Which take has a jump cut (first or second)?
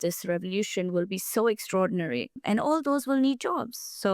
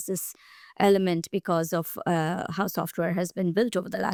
first